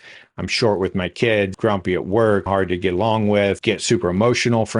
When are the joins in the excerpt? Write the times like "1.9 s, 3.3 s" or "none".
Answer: 1.5 s, 2.4 s, 3.6 s